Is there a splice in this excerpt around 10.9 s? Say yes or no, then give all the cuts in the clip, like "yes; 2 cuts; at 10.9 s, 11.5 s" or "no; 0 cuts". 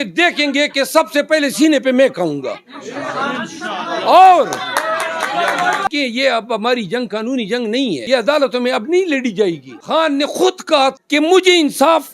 yes; 4 cuts; at 5.9 s, 8.0 s, 9.7 s, 10.9 s